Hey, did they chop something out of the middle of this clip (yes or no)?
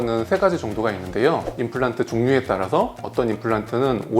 yes